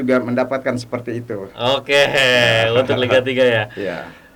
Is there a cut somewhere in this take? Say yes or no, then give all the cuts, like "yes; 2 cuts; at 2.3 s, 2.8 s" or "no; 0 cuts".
no; 0 cuts